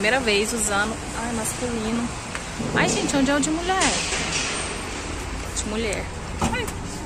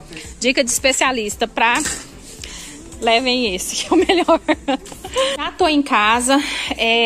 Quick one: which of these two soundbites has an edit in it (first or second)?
second